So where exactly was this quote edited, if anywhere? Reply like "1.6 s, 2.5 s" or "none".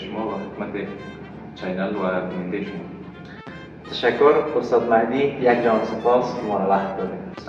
none